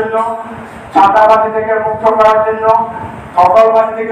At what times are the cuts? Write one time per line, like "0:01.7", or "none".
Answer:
none